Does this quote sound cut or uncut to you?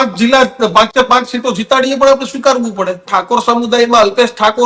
cut